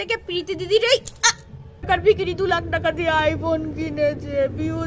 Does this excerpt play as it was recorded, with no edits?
no; 1 cut; at 1.9 s

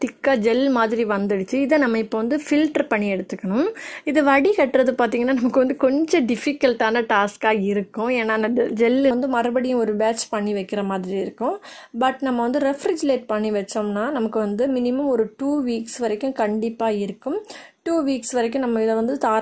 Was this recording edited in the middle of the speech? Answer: yes; 1 cut; at 9.1 s

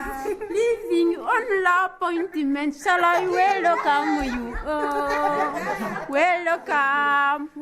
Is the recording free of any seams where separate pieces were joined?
yes; 0 cuts

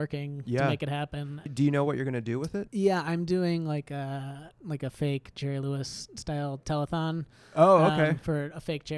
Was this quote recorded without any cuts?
no; 1 cut; at 1.5 s

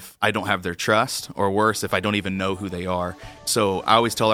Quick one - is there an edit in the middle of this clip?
yes; 1 cut; at 3.4 s

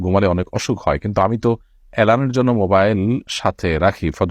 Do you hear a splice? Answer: no; 0 cuts

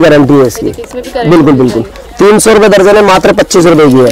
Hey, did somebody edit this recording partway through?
no; 0 cuts

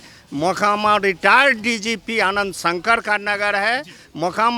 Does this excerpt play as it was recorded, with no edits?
yes; 0 cuts

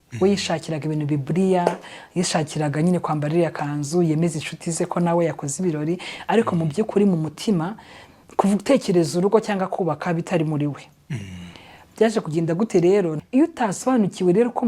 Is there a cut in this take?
yes; 1 cut; at 13.2 s

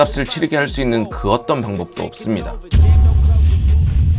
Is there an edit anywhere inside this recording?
yes; 1 cut; at 2.7 s

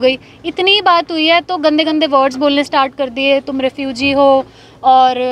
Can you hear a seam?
no; 0 cuts

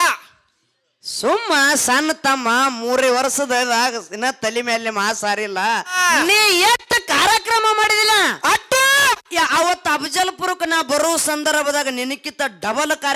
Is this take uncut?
no; 1 cut; at 5.9 s

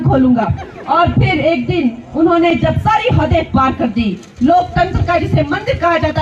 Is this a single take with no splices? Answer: no; 1 cut; at 4.2 s

